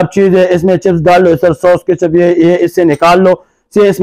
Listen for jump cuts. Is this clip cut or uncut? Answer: uncut